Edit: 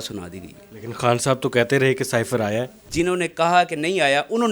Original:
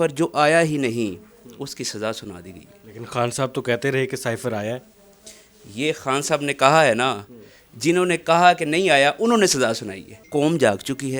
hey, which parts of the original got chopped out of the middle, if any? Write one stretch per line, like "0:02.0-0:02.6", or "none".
0:04.9-0:07.7